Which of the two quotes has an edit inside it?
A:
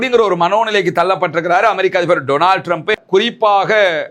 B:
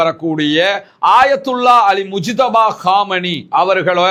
A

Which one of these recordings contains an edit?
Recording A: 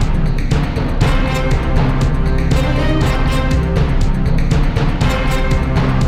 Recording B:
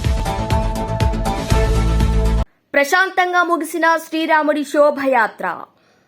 B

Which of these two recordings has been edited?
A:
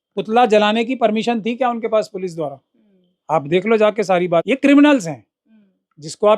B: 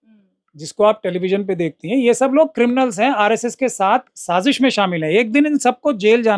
A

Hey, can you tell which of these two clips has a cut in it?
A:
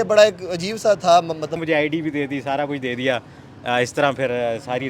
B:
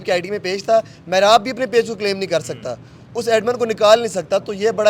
A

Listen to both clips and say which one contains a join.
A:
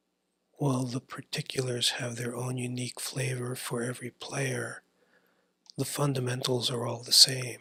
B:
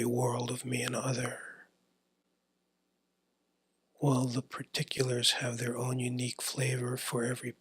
B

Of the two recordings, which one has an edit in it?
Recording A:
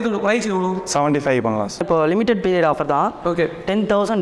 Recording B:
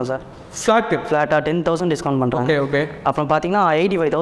A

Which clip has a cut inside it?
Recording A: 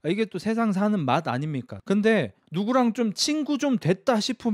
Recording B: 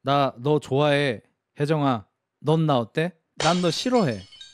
A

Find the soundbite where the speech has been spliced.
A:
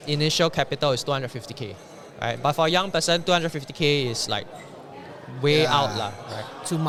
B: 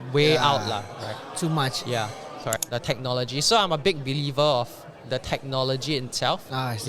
B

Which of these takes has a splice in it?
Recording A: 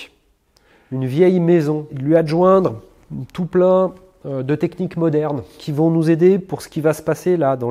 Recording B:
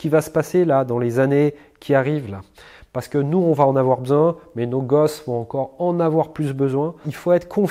A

